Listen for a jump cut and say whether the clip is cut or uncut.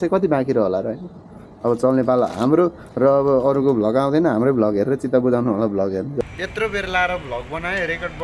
cut